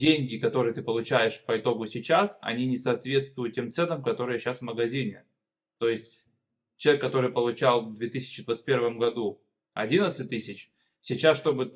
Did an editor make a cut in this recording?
no; 0 cuts

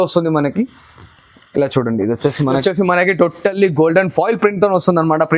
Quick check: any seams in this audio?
yes; 1 cut; at 2.6 s

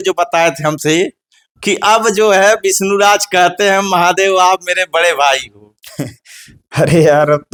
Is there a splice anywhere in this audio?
no; 0 cuts

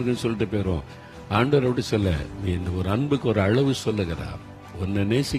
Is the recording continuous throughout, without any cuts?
yes; 0 cuts

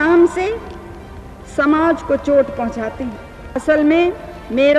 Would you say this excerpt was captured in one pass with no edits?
no; 1 cut; at 3.5 s

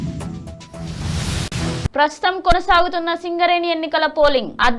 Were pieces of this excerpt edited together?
no; 0 cuts

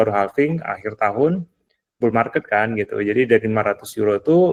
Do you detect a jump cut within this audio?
no; 0 cuts

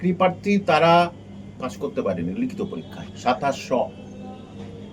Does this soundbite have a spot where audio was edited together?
no; 0 cuts

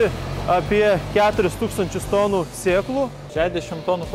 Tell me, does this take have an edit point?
yes; 1 cut; at 3.2 s

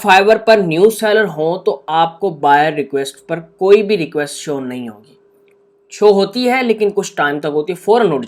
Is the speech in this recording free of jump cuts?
yes; 0 cuts

